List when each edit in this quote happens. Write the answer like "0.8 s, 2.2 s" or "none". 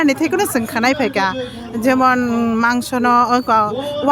none